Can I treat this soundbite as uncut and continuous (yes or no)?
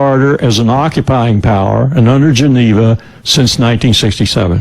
no